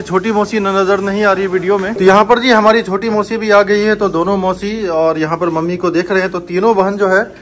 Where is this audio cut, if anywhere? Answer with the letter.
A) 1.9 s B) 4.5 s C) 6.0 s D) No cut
A